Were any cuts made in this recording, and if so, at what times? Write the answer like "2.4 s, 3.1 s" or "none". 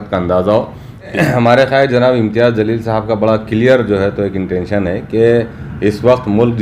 1.1 s